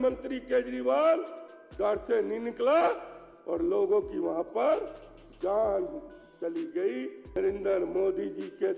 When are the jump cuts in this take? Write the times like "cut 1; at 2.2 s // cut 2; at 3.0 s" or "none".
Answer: cut 1; at 7.3 s